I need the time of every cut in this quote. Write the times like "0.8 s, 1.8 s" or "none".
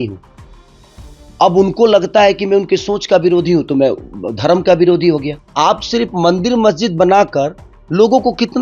5.4 s